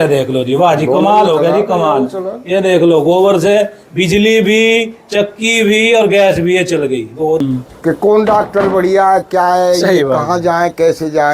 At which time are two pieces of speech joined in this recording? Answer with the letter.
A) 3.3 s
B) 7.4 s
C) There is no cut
B